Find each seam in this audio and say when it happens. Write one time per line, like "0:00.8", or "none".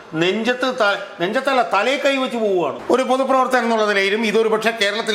0:02.8

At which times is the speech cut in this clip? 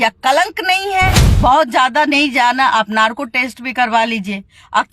0:01.2

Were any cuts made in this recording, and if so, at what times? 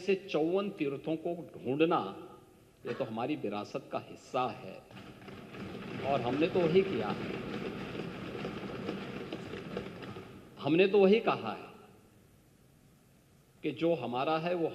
none

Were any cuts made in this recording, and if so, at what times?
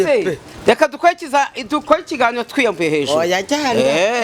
none

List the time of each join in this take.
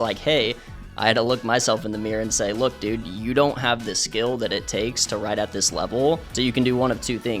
0:06.3

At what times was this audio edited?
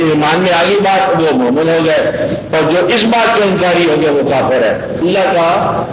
0:05.0

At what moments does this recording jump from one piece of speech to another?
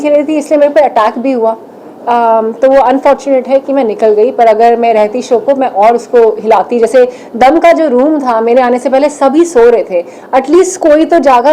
none

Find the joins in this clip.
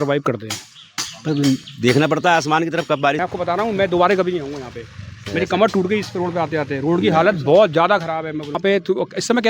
0:03.2
0:08.6

